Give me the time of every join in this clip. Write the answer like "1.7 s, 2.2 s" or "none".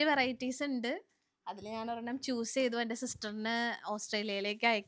none